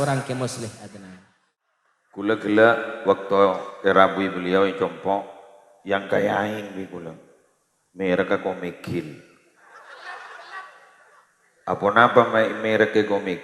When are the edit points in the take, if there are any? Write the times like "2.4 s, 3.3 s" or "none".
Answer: 1.6 s